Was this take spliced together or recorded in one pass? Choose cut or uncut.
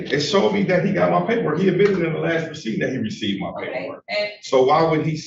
uncut